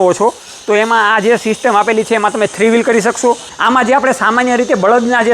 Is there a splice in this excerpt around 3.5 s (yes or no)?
yes